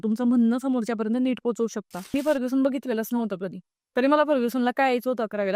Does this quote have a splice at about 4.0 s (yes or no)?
no